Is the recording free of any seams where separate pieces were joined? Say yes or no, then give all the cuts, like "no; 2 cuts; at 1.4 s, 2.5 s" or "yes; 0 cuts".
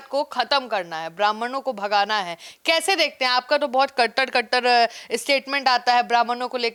yes; 0 cuts